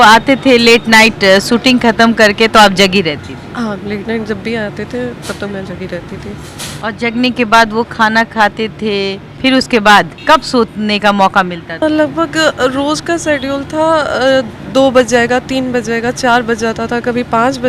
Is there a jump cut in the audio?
no; 0 cuts

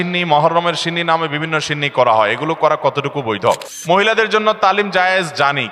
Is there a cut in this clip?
yes; 1 cut; at 3.7 s

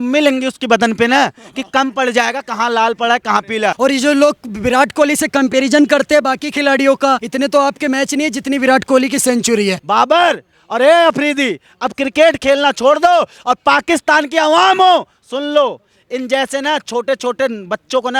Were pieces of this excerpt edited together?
yes; 3 cuts; at 3.7 s, 7.3 s, 9.8 s

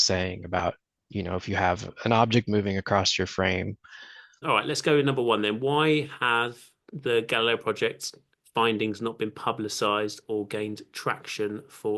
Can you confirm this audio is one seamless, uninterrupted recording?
no; 1 cut; at 4.4 s

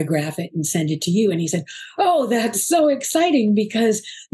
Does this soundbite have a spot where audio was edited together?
no; 0 cuts

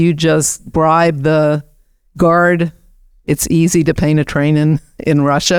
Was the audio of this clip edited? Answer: no; 0 cuts

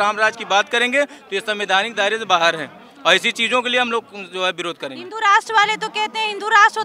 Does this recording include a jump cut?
no; 0 cuts

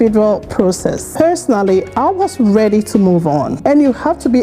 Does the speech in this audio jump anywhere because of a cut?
yes; 2 cuts; at 1.1 s, 3.6 s

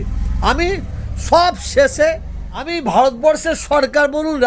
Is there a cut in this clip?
yes; 1 cut; at 2.7 s

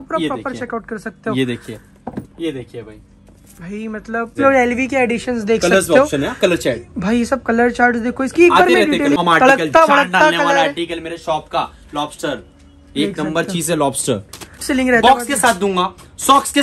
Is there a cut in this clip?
yes; 3 cuts; at 4.4 s, 9.2 s, 14.7 s

